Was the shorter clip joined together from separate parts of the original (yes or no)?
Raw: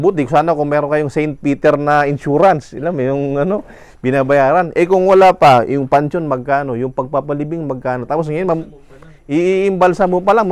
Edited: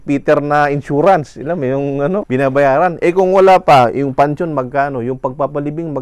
yes